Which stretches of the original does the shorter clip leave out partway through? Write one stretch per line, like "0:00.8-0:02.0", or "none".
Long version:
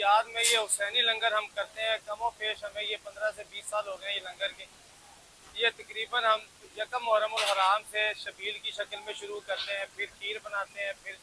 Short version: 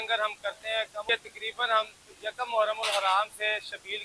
0:02.2-0:05.6